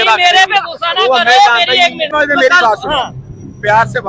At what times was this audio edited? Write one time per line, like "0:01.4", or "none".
0:02.1